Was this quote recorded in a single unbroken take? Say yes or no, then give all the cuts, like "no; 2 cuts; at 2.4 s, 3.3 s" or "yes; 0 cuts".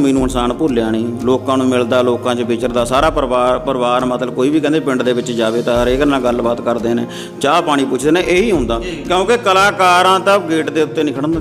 yes; 0 cuts